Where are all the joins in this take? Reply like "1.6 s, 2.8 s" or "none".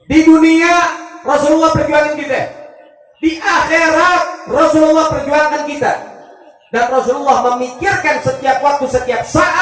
none